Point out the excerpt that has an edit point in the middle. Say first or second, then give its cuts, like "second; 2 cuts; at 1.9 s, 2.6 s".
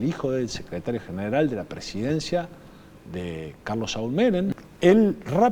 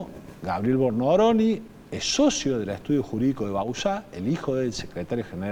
first; 1 cut; at 4.5 s